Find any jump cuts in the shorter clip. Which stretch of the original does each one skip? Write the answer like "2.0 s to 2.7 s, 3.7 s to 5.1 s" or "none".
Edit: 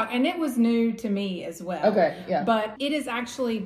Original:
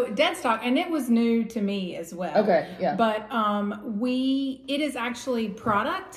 3.2 s to 4.6 s